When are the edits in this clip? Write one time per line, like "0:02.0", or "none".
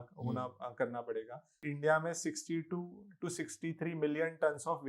0:01.6